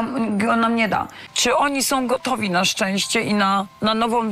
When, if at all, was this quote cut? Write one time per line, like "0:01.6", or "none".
0:01.2